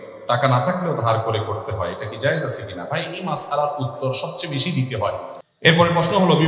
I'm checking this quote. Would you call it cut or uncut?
cut